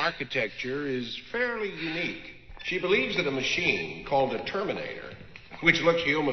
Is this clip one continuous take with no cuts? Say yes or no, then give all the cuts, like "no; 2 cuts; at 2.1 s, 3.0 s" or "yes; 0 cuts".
yes; 0 cuts